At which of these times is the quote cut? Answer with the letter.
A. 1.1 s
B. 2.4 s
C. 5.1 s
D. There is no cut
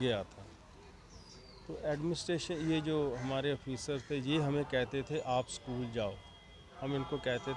D